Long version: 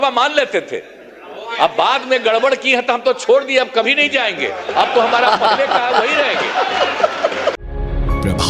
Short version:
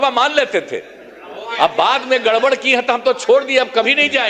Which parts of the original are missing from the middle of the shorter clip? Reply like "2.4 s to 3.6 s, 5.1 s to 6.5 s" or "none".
none